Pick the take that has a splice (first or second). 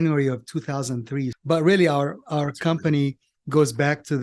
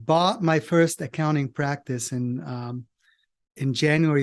first